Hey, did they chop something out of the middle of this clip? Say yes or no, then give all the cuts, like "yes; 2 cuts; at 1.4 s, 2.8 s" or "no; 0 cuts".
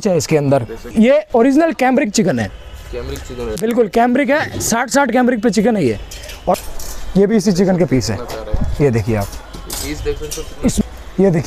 yes; 3 cuts; at 0.9 s, 6.6 s, 10.8 s